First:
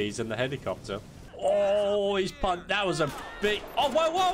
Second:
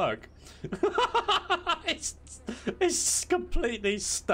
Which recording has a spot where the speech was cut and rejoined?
first; 1 cut; at 1.2 s

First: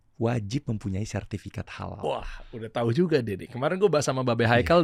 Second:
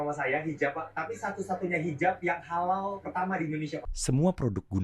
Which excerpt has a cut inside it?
second; 1 cut; at 3.8 s

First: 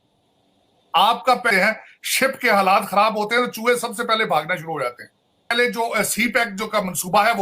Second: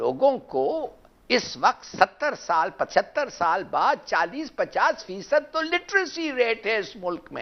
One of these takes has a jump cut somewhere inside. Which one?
first; 2 cuts; at 1.5 s, 5.5 s

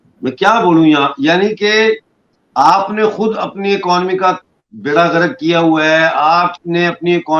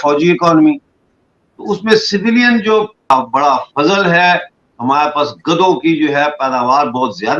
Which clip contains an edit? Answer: second; 1 cut; at 3.1 s

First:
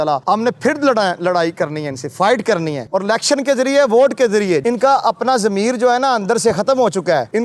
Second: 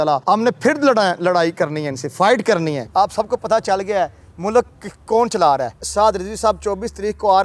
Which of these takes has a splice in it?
second; 2 cuts; at 2.8 s, 5.8 s

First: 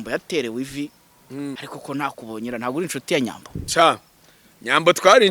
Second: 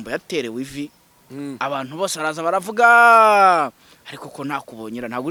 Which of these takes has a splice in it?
first; 1 cut; at 1.5 s

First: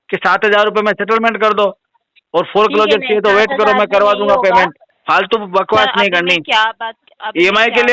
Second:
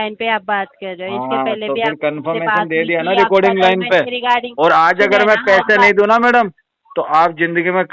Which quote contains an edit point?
first; 1 cut; at 4.9 s

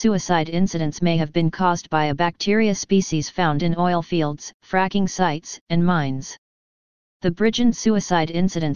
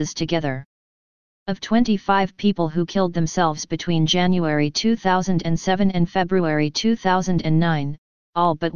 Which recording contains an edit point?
second; 1 cut; at 5.9 s

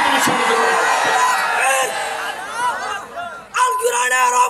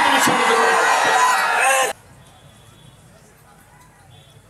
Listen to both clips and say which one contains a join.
second; 1 cut; at 1.9 s

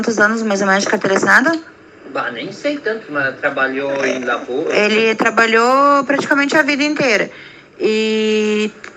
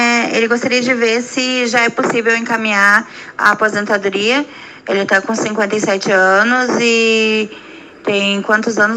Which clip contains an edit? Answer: second; 1 cut; at 3.7 s

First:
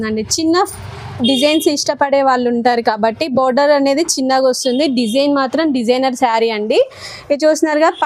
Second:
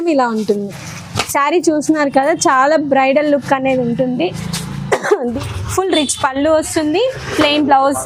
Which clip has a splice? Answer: second; 1 cut; at 5.3 s

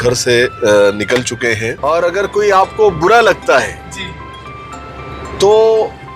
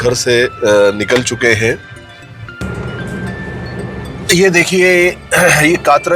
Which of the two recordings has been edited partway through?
first; 1 cut; at 1.7 s

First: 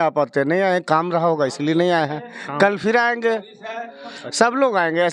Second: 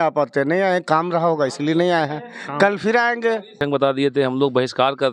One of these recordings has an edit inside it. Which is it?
second; 1 cut; at 3.6 s

